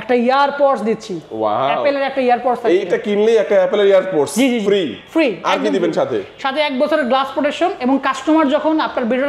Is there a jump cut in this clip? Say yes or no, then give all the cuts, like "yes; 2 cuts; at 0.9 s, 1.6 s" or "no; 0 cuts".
no; 0 cuts